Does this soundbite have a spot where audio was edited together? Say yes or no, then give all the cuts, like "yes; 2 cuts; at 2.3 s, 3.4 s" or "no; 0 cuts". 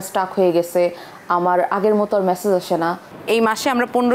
yes; 1 cut; at 3.0 s